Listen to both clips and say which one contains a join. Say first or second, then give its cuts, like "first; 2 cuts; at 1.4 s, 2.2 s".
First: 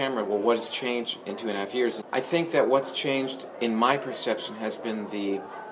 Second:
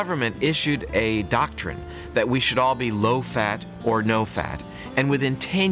first; 1 cut; at 2.0 s